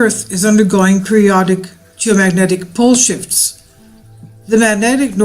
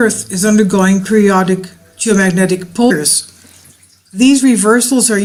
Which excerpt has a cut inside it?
first; 1 cut; at 2.9 s

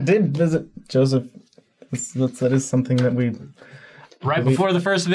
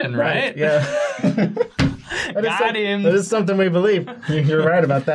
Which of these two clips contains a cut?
second; 1 cut; at 3.0 s

